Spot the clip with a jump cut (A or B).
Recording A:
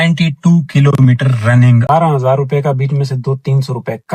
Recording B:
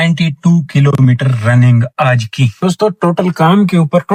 A